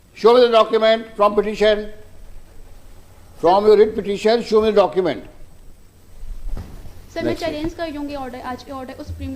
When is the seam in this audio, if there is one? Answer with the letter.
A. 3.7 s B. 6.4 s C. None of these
B